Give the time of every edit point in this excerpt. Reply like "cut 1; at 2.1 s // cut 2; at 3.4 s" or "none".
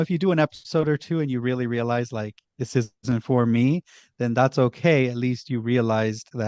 none